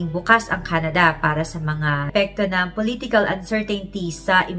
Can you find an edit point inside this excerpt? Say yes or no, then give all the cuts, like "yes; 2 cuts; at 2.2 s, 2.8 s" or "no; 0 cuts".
yes; 1 cut; at 2.0 s